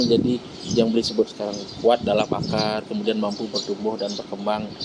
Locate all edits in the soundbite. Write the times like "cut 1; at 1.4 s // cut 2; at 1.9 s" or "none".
none